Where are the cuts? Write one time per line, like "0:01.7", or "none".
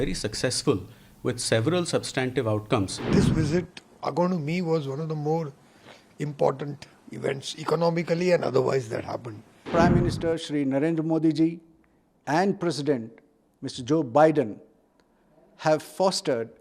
0:03.0
0:09.7